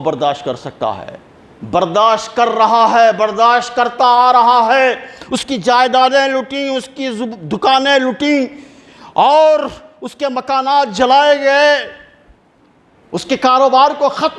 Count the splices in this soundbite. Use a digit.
0